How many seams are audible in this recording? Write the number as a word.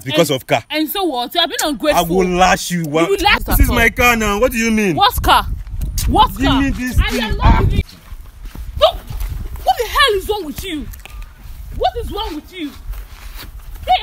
two